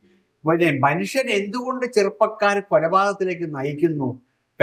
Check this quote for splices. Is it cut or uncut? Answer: uncut